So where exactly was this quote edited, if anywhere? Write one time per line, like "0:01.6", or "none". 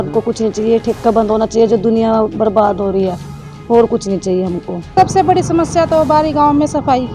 0:04.9

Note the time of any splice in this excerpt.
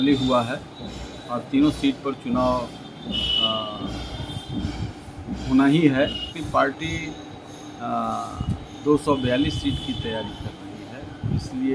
0:06.3

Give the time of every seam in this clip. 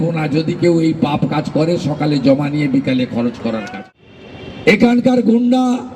0:03.7

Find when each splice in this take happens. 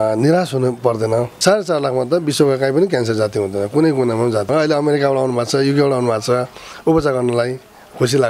0:01.3
0:04.5

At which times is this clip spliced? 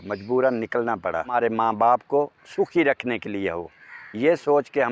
0:01.3

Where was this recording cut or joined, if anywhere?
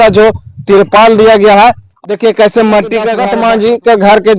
0:01.9
0:03.2

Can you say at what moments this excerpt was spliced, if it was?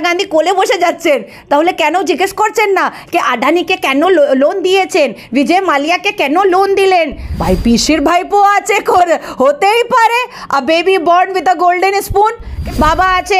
0:07.3
0:12.5

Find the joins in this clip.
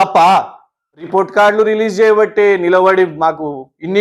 0:00.9

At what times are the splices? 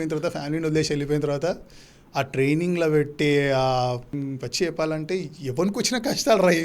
0:04.1

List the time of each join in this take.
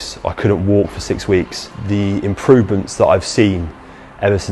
0:01.7

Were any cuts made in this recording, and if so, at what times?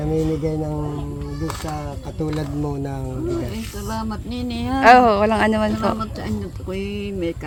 none

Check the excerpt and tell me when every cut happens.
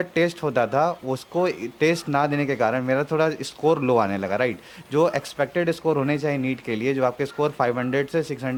none

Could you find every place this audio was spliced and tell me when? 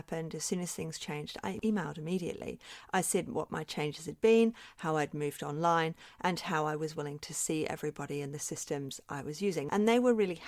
0:01.6
0:09.7

